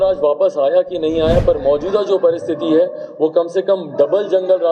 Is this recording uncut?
yes; 0 cuts

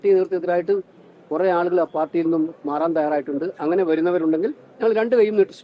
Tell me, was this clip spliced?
no; 0 cuts

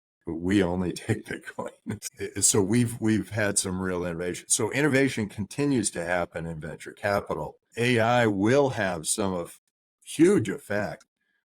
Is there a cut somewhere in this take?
yes; 2 cuts; at 2.0 s, 7.7 s

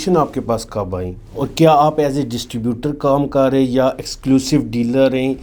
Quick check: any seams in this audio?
no; 0 cuts

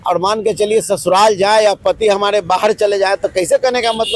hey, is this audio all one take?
yes; 0 cuts

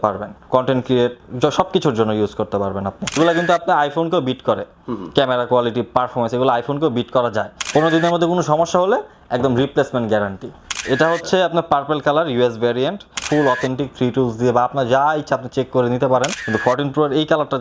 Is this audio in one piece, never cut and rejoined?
no; 5 cuts; at 3.2 s, 7.6 s, 10.7 s, 13.2 s, 16.4 s

